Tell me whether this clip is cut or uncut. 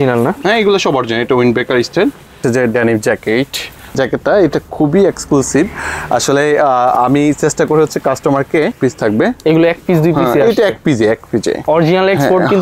cut